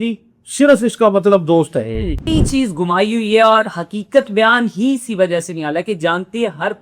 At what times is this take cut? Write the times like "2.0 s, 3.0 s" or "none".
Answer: 2.3 s